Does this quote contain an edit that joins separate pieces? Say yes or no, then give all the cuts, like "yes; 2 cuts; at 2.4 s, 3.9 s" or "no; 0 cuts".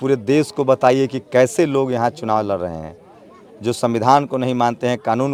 no; 0 cuts